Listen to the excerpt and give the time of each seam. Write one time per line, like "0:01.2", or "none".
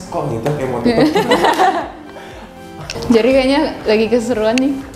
0:02.9

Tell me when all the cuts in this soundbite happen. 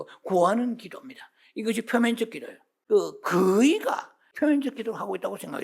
0:02.7
0:04.3

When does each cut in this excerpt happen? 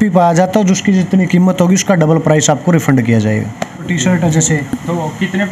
0:03.9

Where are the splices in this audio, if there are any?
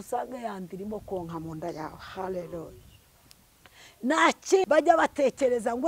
0:04.6

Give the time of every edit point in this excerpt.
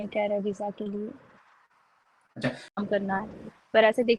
0:02.6

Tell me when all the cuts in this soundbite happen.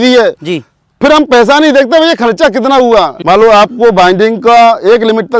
0:03.2

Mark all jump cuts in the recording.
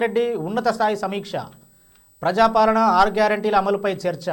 none

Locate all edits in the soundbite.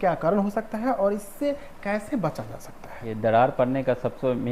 none

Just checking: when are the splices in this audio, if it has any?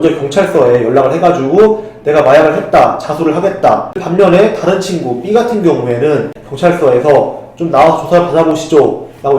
0:04.0
0:06.4

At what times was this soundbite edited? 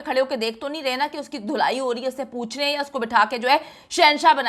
none

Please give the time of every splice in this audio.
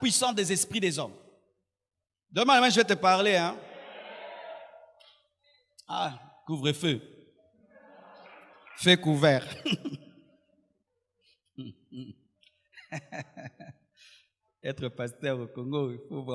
none

